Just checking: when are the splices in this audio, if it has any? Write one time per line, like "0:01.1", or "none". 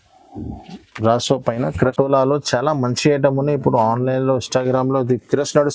0:01.9